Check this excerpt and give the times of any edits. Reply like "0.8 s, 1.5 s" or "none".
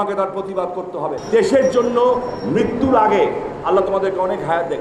1.2 s